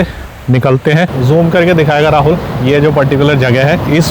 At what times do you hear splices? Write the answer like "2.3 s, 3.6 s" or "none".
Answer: 1.2 s